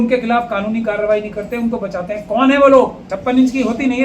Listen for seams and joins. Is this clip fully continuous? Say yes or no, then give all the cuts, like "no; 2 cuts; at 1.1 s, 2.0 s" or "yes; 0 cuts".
no; 1 cut; at 3.1 s